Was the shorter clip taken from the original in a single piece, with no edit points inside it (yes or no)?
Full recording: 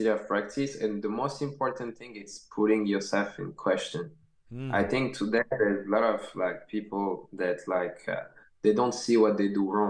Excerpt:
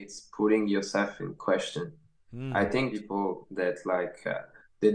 no